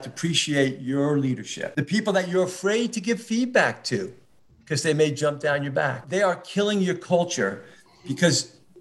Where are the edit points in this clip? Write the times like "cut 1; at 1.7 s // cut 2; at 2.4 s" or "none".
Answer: cut 1; at 1.6 s // cut 2; at 6.0 s